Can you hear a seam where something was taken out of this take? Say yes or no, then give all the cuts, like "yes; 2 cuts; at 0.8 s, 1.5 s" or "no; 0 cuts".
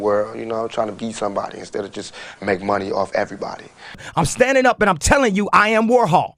yes; 1 cut; at 4.0 s